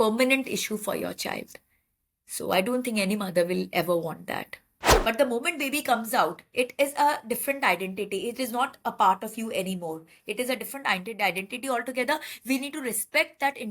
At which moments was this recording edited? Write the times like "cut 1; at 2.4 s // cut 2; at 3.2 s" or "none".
cut 1; at 4.8 s